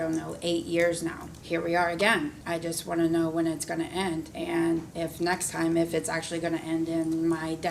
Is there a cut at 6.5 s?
no; 4 cuts; at 1.3 s, 2.4 s, 4.3 s, 4.9 s

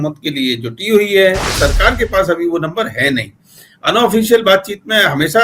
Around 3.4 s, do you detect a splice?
no; 1 cut; at 1.6 s

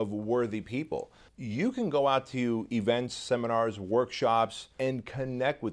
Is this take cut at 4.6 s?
yes; 2 cuts; at 1.2 s, 4.6 s

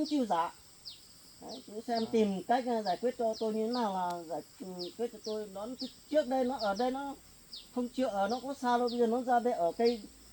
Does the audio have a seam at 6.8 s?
no; 0 cuts

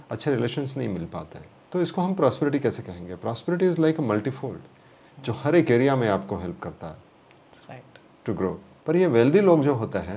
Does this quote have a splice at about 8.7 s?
yes; 1 cut; at 8.7 s

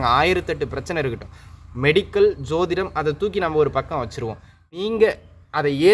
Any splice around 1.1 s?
no; 1 cut; at 4.7 s

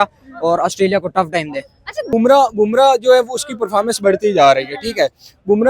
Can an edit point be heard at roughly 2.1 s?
yes; 1 cut; at 2.1 s

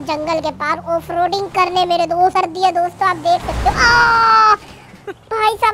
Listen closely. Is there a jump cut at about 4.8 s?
no; 1 cut; at 2.3 s

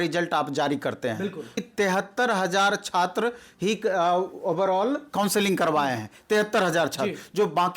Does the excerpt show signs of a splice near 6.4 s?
no; 1 cut; at 1.6 s

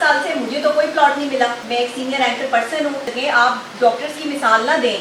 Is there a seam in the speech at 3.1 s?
yes; 2 cuts; at 1.6 s, 3.1 s

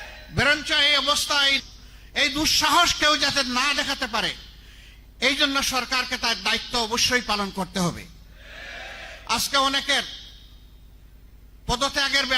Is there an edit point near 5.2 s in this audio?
no; 1 cut; at 1.6 s

